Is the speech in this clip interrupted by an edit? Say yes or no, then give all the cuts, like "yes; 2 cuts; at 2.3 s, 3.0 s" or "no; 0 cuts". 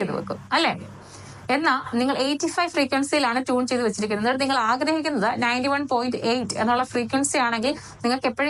no; 0 cuts